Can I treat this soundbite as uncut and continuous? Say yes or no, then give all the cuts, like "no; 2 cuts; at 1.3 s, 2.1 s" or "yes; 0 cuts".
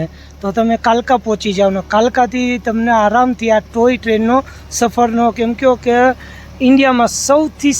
yes; 0 cuts